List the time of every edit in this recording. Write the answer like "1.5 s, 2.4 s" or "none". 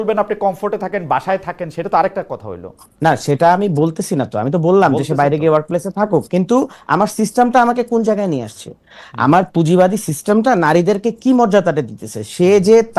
none